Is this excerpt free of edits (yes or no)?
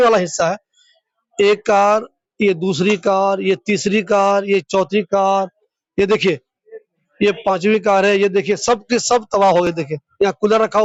yes